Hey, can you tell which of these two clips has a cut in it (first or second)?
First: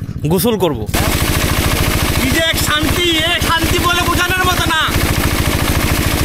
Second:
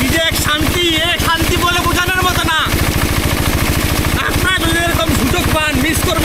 first